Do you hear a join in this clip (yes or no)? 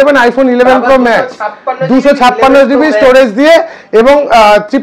no